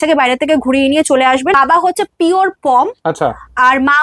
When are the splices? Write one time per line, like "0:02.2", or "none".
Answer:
0:01.5

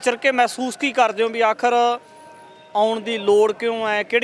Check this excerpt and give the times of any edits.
none

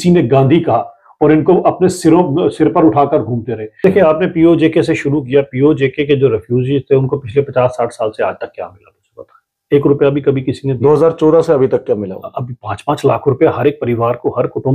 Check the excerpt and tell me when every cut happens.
0:03.7

